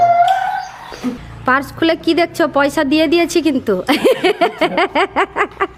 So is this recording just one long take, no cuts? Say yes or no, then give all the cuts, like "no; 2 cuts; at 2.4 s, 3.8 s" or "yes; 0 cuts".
no; 1 cut; at 1.3 s